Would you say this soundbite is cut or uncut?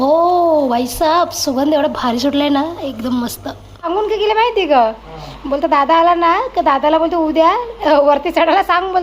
cut